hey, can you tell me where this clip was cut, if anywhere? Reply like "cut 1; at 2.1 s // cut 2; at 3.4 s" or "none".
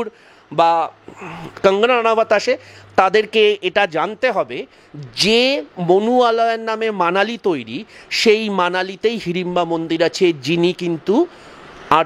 none